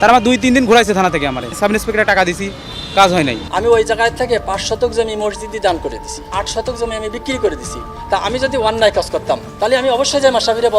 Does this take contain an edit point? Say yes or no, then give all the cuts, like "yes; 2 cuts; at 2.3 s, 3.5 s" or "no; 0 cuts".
yes; 4 cuts; at 1.5 s, 3.4 s, 6.3 s, 7.9 s